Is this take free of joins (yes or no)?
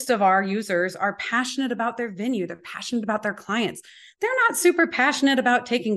yes